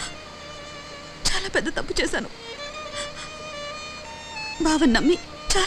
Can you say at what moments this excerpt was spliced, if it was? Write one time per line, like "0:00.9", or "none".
none